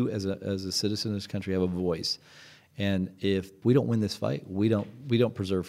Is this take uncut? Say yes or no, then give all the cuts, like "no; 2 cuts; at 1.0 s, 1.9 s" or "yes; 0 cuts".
no; 1 cut; at 3.6 s